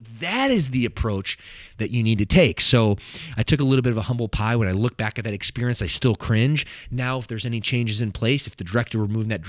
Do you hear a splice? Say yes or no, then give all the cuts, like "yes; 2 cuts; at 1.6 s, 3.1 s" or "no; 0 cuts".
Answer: no; 0 cuts